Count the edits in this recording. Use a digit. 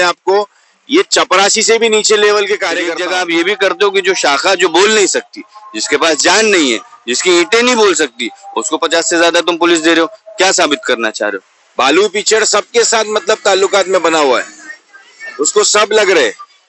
2